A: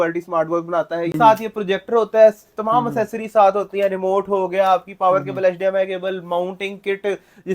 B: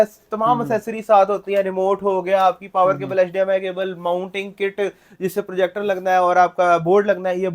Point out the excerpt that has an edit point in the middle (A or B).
A